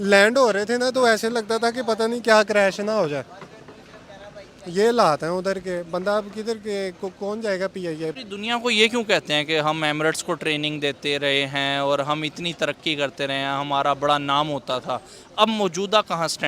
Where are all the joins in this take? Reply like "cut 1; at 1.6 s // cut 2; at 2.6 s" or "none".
cut 1; at 8.1 s